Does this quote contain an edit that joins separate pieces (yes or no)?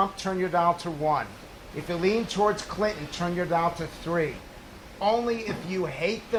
no